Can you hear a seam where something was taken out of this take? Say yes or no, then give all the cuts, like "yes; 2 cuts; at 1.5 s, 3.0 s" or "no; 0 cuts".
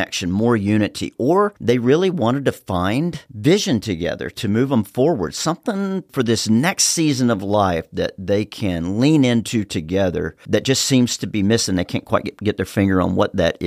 no; 0 cuts